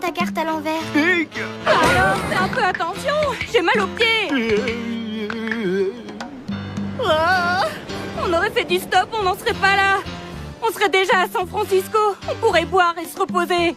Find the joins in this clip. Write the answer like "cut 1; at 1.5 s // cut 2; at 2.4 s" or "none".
cut 1; at 4.8 s